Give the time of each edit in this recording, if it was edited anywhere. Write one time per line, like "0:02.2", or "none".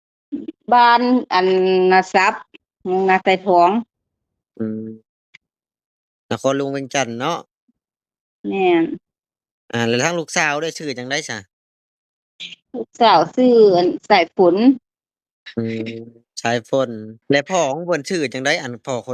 0:17.1